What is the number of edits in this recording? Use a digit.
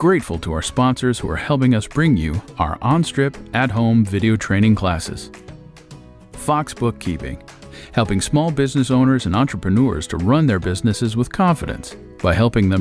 0